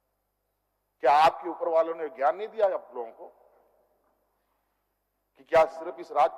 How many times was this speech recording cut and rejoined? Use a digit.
0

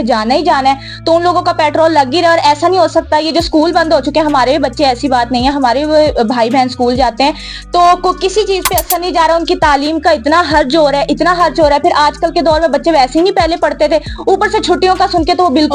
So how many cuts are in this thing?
0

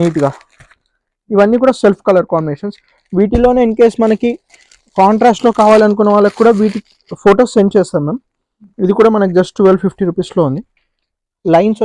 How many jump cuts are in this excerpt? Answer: 0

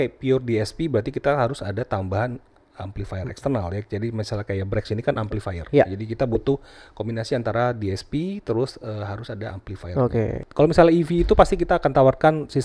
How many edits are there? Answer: 1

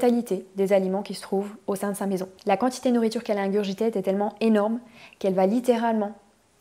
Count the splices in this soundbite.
1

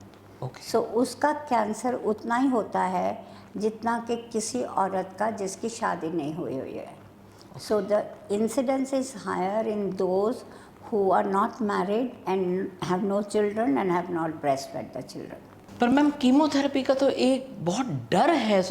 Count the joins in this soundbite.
1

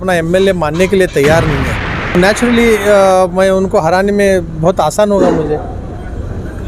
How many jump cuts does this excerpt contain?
1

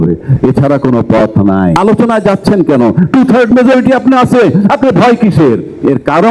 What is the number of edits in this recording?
1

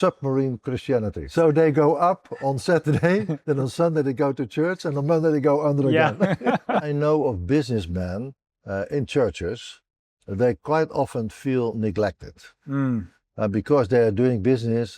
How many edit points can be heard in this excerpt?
2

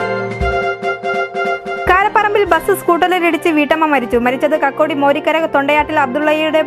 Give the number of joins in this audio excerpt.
1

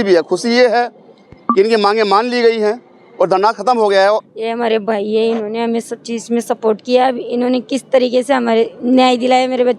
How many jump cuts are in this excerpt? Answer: 1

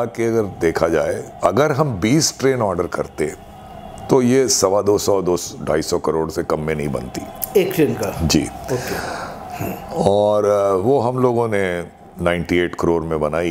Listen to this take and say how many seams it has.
0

